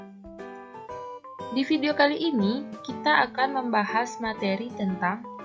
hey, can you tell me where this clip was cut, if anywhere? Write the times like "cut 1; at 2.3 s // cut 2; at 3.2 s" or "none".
cut 1; at 1.1 s